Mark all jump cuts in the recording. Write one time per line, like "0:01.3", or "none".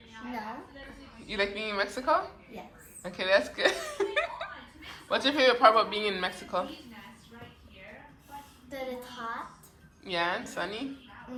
none